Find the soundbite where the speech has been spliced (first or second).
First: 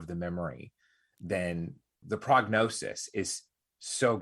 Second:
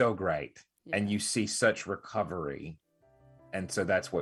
first